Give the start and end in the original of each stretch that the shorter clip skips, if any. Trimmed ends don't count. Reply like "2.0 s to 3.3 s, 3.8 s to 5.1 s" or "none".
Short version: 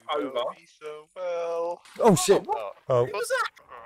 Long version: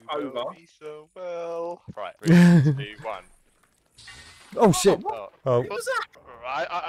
1.9 s to 4.4 s